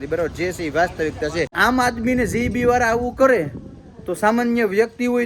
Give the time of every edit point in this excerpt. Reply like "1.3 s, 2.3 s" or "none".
1.5 s